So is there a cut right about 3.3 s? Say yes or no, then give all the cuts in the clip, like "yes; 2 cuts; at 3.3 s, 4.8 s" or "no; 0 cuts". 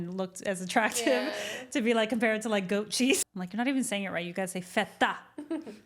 yes; 1 cut; at 3.3 s